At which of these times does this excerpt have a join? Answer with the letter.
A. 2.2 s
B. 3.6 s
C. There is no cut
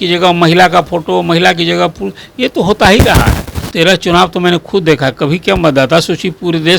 B